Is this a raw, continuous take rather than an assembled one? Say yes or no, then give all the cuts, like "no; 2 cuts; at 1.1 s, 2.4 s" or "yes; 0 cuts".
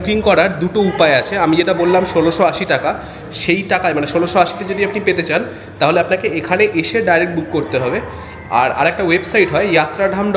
yes; 0 cuts